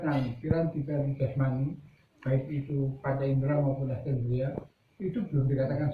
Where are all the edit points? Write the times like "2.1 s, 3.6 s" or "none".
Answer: none